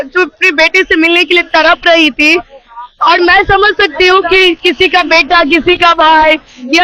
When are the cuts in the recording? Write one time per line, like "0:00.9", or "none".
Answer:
none